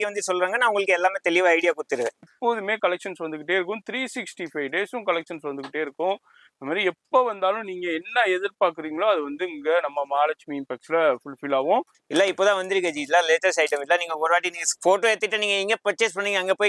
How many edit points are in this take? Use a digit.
2